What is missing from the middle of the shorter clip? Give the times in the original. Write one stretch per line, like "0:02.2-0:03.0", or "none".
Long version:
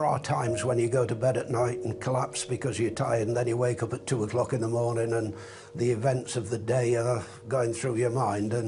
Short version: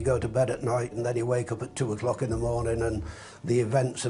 0:01.8-0:03.2